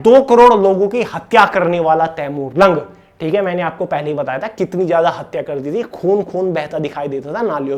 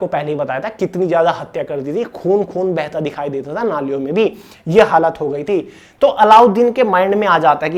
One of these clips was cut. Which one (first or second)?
second